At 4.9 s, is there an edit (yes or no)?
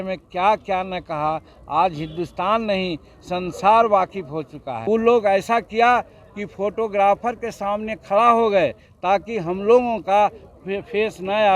yes